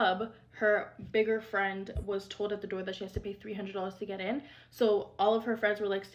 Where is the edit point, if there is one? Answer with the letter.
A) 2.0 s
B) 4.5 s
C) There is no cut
B